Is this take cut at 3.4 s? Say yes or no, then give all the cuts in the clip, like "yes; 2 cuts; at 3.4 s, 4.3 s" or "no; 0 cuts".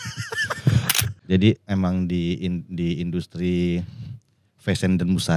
no; 1 cut; at 1.1 s